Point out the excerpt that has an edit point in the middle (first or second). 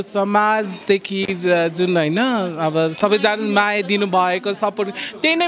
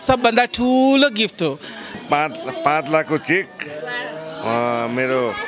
second